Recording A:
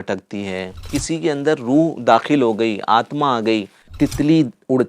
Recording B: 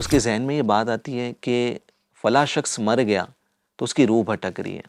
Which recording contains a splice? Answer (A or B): A